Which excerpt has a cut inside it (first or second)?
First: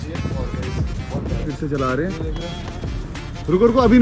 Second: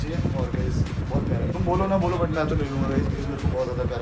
first